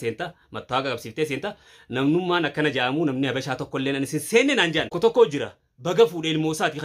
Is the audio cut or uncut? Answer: cut